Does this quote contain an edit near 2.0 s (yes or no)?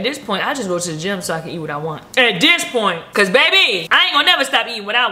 yes